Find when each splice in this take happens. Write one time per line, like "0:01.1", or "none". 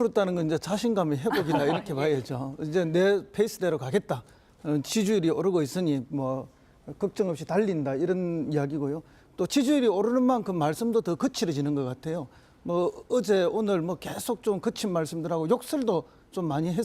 0:03.6